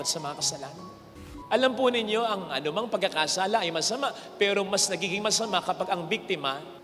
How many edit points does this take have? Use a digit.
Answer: 1